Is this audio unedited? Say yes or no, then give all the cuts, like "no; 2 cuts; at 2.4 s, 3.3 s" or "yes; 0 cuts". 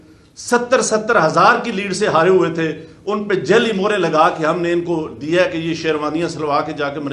yes; 0 cuts